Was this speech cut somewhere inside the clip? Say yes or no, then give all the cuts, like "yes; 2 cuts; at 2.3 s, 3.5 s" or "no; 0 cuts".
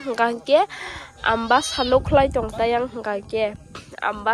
no; 0 cuts